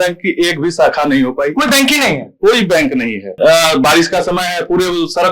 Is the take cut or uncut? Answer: cut